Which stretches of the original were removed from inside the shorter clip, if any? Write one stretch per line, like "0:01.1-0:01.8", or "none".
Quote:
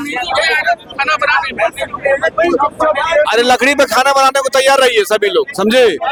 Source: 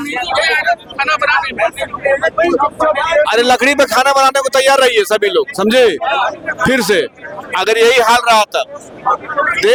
none